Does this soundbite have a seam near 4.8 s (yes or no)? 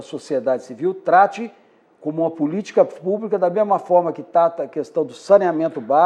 no